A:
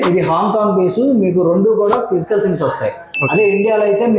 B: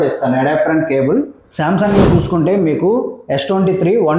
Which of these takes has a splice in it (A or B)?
B